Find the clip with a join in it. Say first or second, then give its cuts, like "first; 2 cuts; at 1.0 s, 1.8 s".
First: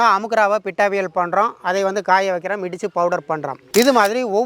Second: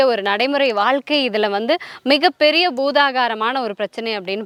first; 1 cut; at 3.6 s